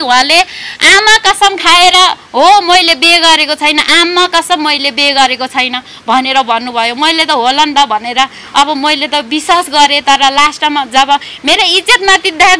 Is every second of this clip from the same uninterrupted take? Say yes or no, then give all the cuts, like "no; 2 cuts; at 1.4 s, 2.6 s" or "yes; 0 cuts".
yes; 0 cuts